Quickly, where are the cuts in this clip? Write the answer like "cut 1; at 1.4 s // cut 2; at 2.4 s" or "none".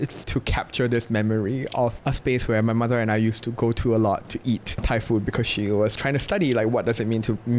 none